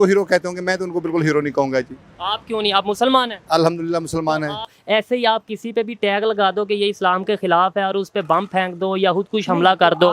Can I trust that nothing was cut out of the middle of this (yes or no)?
no